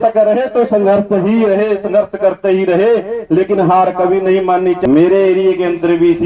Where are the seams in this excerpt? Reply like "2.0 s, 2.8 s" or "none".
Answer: 4.8 s